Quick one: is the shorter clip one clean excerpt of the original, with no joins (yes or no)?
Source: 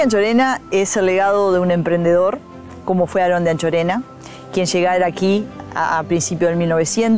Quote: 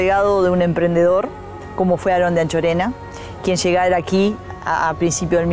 yes